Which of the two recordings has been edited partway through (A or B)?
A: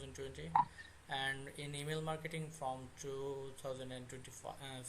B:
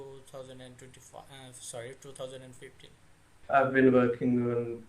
B